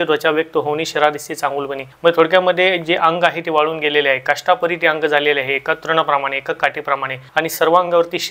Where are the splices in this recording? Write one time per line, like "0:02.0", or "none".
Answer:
0:01.8
0:07.2